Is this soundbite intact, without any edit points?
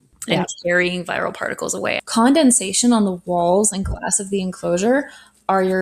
no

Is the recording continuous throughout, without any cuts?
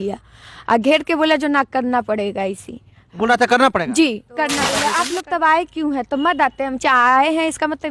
no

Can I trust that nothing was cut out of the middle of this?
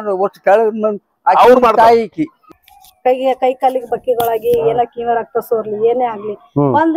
no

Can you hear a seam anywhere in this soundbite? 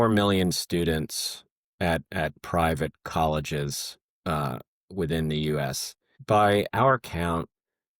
yes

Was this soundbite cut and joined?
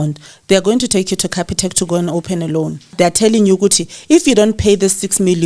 yes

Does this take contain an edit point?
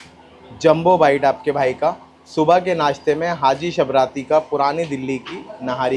no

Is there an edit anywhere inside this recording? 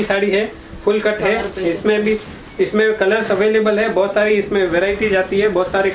no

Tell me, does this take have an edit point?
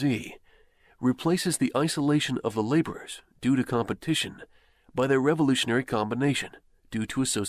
yes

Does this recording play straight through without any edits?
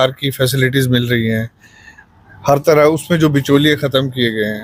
yes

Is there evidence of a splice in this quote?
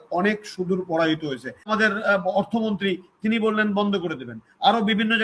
yes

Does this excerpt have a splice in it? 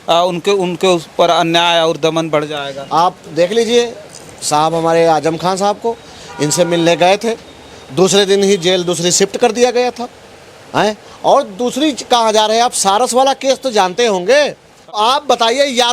yes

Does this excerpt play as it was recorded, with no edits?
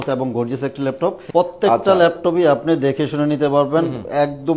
no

